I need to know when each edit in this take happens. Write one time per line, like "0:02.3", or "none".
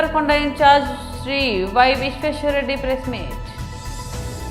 0:03.3